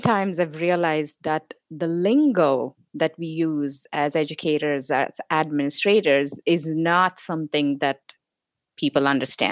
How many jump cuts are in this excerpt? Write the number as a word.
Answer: zero